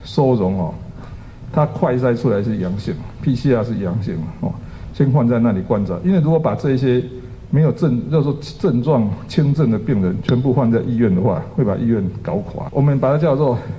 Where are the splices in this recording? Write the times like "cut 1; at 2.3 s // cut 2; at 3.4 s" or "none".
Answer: cut 1; at 12.6 s